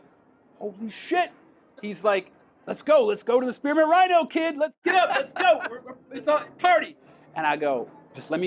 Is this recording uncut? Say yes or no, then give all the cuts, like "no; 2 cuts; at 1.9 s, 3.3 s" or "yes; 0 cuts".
yes; 0 cuts